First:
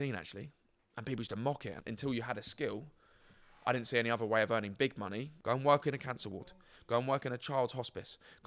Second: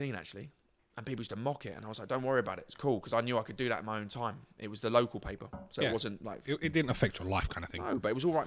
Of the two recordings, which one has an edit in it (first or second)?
first